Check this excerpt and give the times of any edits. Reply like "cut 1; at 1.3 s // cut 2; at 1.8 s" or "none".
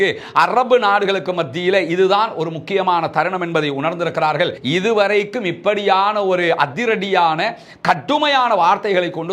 cut 1; at 4.6 s